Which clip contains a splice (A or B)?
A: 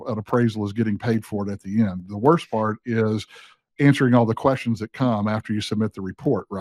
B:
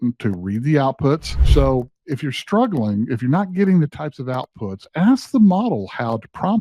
B